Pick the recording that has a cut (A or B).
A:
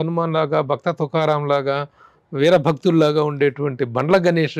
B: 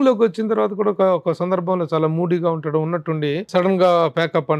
B